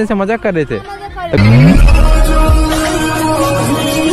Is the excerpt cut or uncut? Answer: uncut